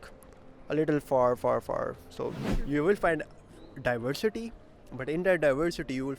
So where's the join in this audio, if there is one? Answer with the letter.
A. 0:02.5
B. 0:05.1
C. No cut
A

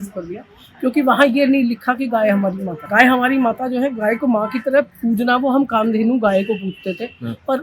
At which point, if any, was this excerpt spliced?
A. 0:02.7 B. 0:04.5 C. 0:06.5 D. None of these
A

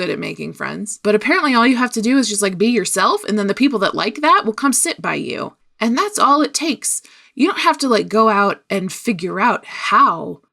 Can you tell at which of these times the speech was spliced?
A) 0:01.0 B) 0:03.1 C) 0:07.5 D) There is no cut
A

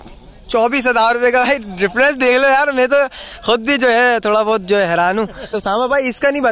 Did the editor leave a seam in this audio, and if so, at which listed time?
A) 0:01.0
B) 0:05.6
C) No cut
B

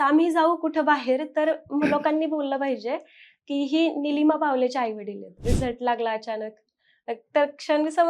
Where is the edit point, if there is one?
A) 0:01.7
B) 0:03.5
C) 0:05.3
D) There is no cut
C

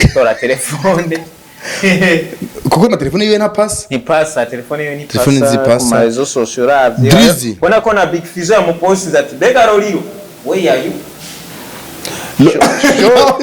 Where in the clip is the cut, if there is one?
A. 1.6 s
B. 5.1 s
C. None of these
C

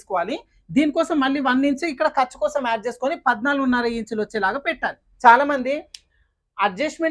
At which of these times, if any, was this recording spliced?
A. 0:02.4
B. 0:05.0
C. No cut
B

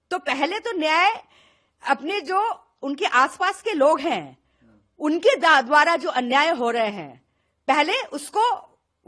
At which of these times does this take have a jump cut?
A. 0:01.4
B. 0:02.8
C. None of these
C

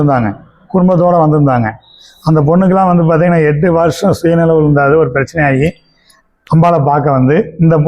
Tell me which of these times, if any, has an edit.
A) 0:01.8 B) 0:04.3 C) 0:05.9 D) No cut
D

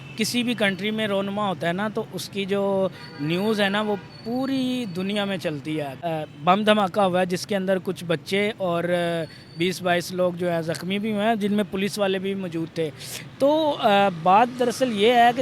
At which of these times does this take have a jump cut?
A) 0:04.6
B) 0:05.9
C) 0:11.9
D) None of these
B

